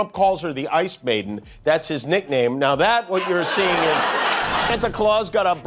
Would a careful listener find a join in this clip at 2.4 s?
no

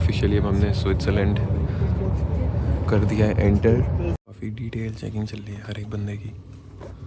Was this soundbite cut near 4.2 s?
yes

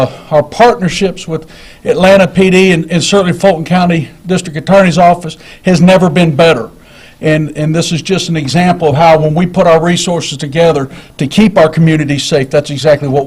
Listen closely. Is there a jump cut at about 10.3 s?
yes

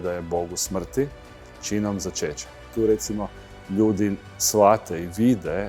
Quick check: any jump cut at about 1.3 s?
no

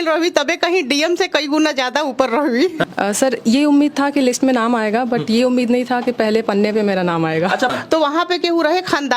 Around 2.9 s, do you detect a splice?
yes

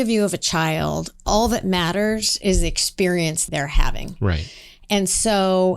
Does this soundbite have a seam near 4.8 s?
no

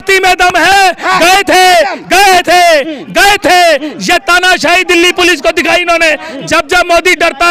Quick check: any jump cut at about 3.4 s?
no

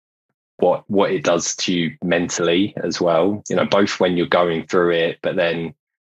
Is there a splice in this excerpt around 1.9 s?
no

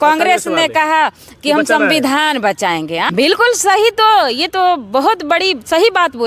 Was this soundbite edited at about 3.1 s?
yes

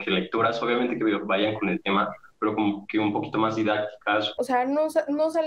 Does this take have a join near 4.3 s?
yes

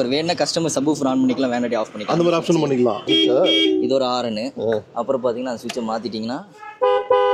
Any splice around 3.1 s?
yes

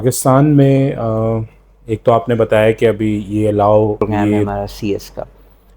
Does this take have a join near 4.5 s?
yes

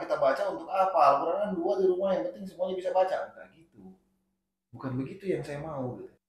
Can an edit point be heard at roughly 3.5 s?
no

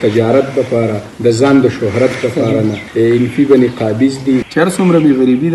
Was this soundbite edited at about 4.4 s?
yes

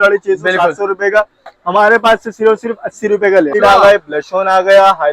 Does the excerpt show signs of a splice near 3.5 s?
yes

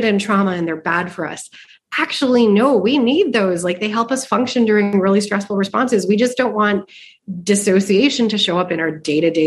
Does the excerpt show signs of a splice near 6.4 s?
no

